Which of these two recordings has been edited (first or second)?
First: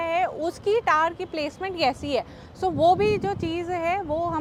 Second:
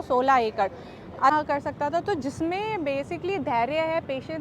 second